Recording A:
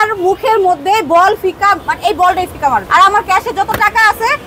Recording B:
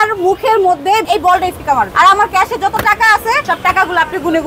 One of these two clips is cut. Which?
B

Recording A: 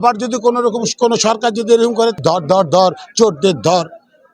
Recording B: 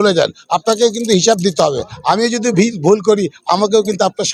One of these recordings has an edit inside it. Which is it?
A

